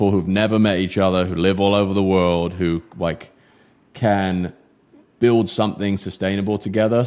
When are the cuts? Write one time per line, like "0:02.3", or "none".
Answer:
none